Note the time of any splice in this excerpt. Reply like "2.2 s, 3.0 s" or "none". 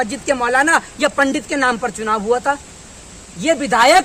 none

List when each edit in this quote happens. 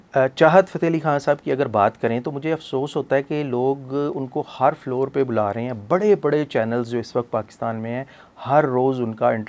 none

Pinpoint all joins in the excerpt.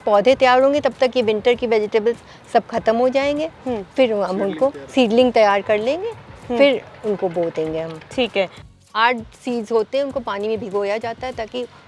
8.7 s

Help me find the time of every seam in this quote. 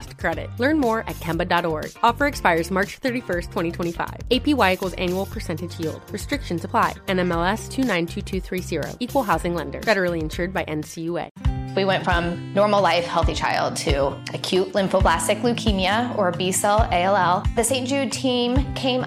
11.4 s

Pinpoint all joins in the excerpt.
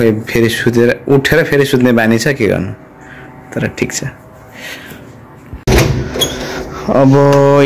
none

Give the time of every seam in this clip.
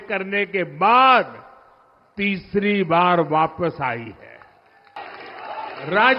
5.0 s

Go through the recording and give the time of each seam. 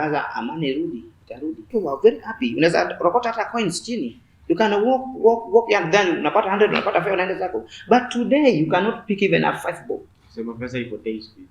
1.7 s

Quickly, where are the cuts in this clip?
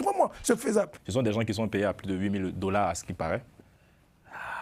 1.0 s

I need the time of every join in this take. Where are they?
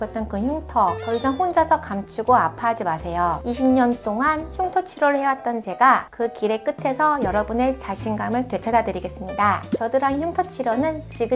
3.4 s, 9.6 s

